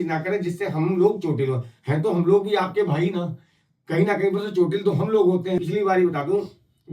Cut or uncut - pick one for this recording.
cut